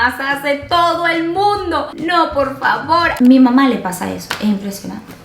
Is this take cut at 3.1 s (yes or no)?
yes